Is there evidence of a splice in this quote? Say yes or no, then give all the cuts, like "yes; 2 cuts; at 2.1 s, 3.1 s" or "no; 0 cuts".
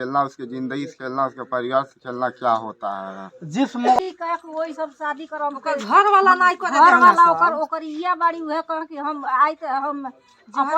yes; 1 cut; at 4.0 s